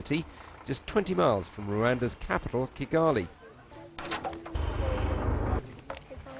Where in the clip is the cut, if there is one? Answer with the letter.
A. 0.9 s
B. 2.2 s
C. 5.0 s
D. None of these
C